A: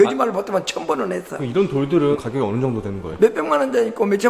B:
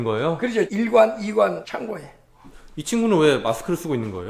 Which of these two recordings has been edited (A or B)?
A